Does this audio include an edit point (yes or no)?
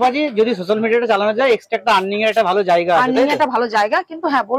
no